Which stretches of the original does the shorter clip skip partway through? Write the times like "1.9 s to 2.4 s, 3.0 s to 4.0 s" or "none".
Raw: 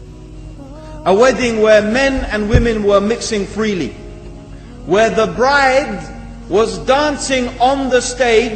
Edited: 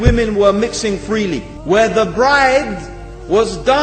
4.0 s to 4.7 s

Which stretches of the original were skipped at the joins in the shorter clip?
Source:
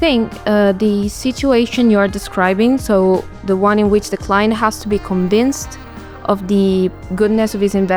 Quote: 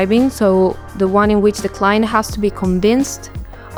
none

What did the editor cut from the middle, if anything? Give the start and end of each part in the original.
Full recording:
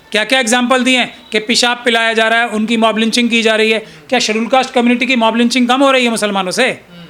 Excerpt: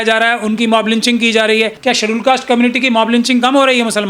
3.9 s to 4.0 s

